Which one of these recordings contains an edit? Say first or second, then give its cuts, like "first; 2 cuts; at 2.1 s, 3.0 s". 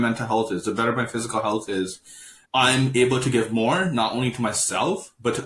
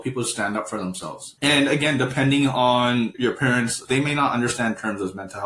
second; 2 cuts; at 1.2 s, 3.8 s